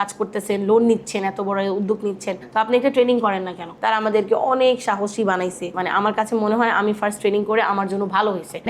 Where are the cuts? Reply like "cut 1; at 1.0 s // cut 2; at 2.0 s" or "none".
cut 1; at 3.8 s